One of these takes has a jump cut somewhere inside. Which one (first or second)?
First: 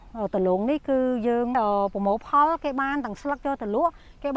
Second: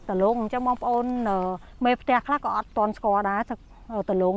first